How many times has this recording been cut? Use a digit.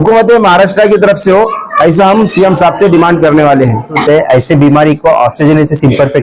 1